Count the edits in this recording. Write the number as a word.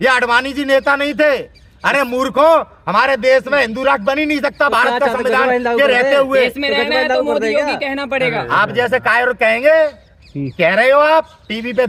zero